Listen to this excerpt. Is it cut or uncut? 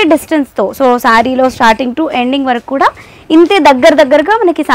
uncut